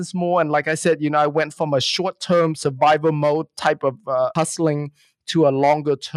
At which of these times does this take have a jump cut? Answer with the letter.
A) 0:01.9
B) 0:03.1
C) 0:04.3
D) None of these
C